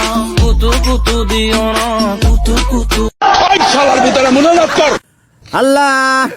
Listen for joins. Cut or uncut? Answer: cut